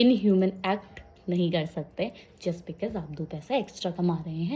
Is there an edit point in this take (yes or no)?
no